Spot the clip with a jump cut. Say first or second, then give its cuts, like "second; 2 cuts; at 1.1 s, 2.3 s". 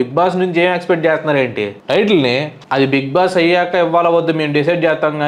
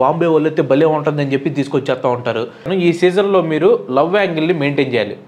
second; 1 cut; at 2.7 s